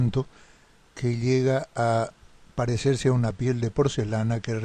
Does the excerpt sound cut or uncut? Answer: cut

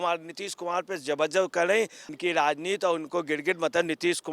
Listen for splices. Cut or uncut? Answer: cut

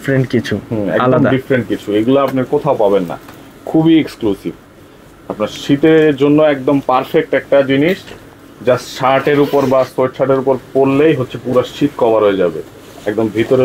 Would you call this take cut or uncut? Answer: uncut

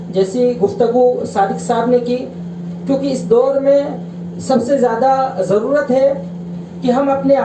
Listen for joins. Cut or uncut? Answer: uncut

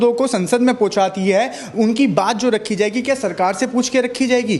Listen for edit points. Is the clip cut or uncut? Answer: uncut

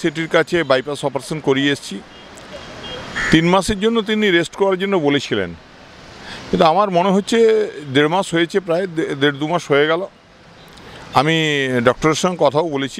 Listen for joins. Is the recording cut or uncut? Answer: uncut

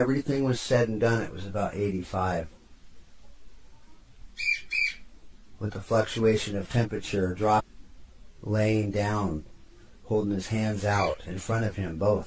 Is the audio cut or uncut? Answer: uncut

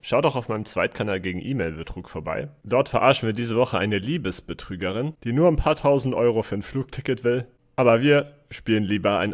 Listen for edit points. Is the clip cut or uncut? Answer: uncut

